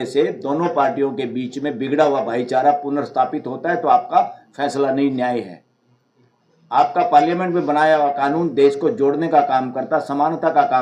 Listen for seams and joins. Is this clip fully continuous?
yes; 0 cuts

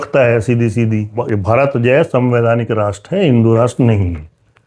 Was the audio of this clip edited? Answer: yes; 1 cut; at 1.2 s

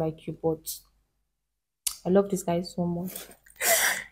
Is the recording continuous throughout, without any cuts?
yes; 0 cuts

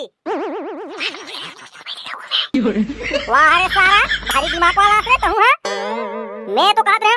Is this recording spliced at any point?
no; 0 cuts

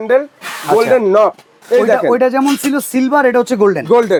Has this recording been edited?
no; 0 cuts

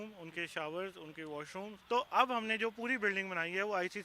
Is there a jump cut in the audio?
yes; 1 cut; at 1.8 s

